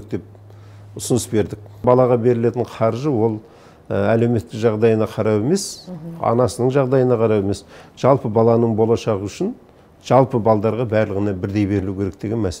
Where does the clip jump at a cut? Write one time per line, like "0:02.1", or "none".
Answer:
0:01.8